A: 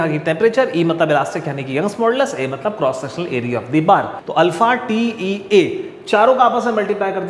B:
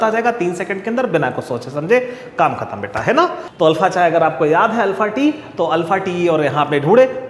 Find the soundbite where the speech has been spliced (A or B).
A